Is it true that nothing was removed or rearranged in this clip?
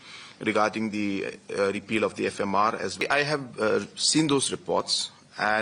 no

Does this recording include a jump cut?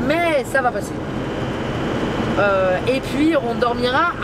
no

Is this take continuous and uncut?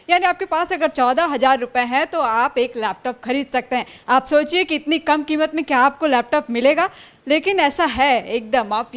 yes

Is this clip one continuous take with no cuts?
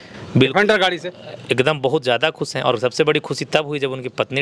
yes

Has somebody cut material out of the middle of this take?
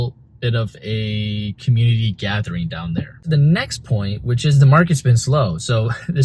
yes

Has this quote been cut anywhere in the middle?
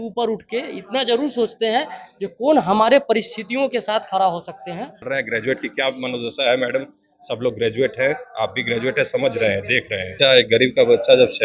yes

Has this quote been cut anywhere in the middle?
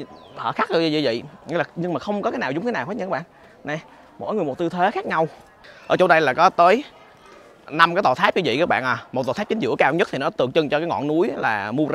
no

